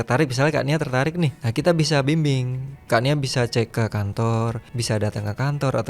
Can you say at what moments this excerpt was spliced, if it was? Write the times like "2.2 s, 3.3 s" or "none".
1.4 s, 3.7 s, 4.7 s

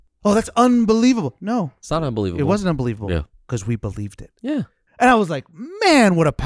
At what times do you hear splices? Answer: 4.8 s

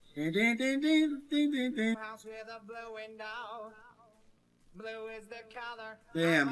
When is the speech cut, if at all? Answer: 1.9 s

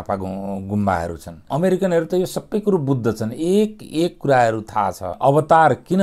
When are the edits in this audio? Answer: 1.4 s, 5.1 s

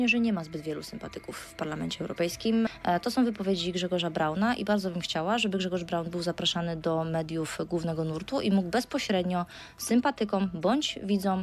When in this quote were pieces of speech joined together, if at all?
2.7 s

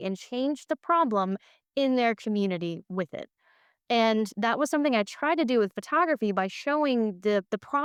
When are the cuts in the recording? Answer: none

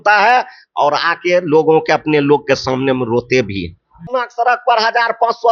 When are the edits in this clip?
4.1 s

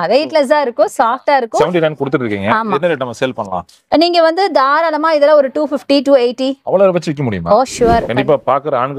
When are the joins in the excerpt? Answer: 1.6 s, 8.1 s

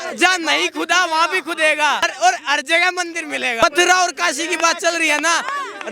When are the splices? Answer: 2.1 s, 3.6 s

